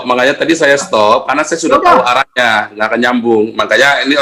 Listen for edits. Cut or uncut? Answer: uncut